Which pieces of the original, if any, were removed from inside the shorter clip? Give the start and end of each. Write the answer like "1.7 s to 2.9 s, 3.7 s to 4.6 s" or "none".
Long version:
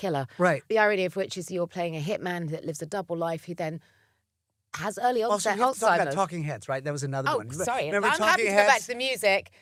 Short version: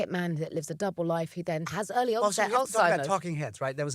3.8 s to 4.8 s